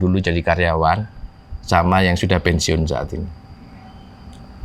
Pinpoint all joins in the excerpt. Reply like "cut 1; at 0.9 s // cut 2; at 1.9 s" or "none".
none